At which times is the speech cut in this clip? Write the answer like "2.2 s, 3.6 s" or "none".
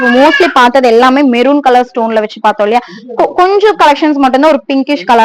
none